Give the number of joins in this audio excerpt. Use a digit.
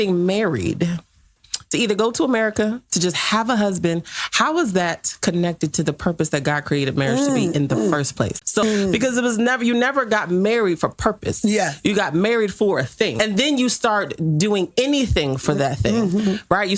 2